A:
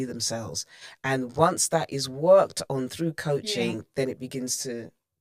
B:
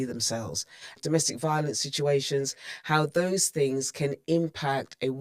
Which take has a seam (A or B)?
B